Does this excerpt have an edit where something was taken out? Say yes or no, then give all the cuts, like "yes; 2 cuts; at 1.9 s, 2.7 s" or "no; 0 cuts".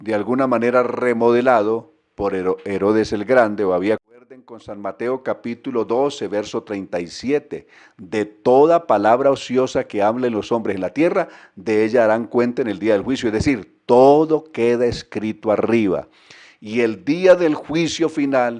yes; 1 cut; at 4.2 s